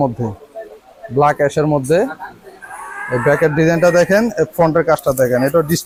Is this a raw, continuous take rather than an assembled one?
yes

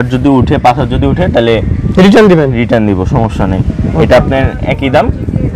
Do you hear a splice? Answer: no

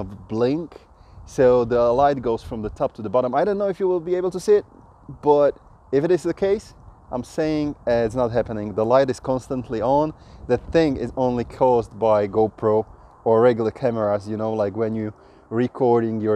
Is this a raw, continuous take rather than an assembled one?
yes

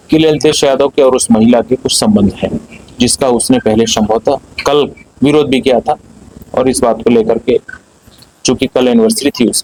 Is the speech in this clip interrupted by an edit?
no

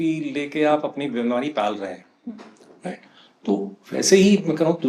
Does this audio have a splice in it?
no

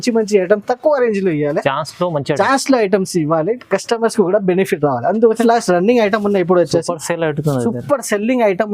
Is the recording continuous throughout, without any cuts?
no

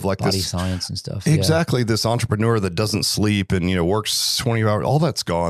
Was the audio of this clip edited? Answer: no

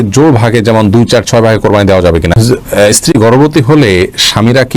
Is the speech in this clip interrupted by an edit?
yes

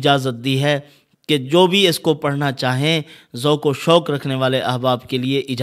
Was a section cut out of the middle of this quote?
no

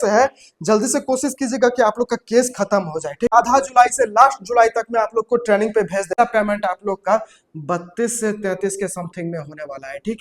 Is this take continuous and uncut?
no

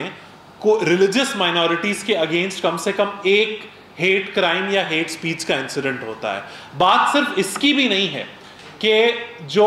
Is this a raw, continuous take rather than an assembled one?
yes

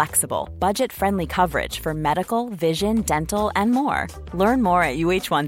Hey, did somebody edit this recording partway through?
no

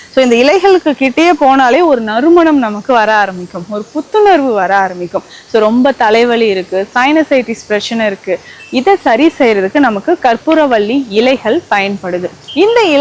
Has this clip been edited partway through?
no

